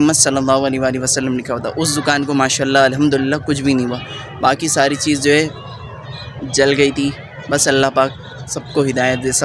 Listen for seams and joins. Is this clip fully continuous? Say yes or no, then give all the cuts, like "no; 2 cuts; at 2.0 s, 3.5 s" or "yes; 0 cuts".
yes; 0 cuts